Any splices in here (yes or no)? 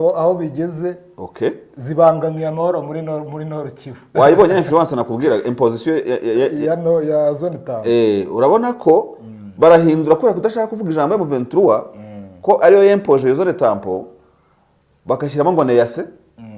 no